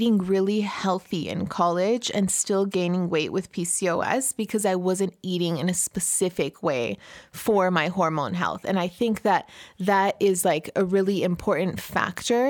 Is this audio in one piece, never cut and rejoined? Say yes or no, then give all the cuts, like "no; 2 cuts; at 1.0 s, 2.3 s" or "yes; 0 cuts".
yes; 0 cuts